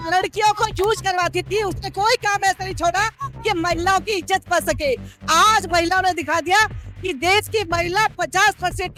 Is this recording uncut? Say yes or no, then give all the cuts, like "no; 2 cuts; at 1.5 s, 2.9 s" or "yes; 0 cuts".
yes; 0 cuts